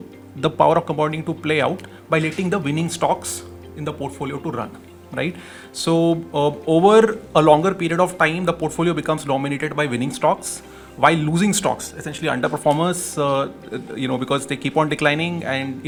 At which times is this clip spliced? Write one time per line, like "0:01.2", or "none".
none